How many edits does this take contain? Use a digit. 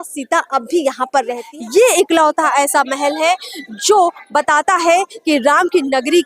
1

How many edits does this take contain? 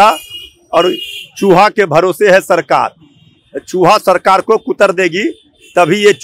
0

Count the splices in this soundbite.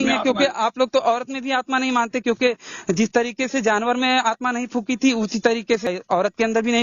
1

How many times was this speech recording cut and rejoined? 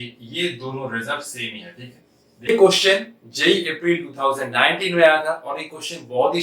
1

